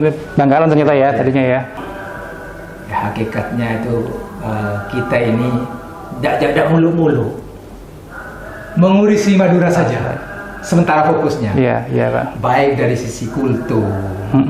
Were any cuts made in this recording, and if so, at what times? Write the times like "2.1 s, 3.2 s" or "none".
1.8 s